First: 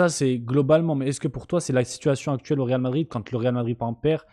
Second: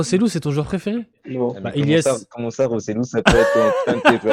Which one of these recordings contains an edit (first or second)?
second